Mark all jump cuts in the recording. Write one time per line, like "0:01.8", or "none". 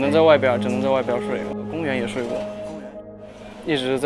0:01.5